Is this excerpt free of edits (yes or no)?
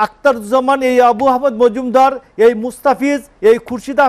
yes